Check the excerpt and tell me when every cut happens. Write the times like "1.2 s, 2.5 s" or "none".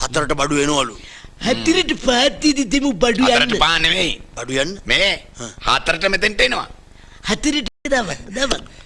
7.6 s